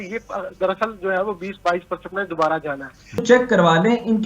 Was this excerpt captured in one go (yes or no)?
no